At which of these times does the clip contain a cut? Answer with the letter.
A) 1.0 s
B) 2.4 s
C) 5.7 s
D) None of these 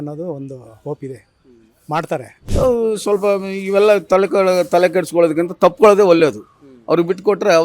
B